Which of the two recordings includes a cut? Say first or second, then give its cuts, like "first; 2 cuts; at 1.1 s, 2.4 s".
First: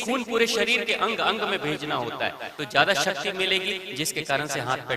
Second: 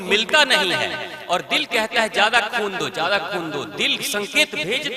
first; 1 cut; at 2.5 s